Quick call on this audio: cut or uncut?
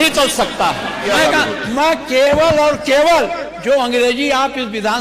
cut